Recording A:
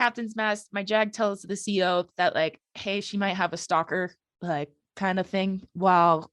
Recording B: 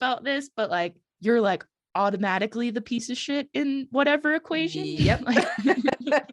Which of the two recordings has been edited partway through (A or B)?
B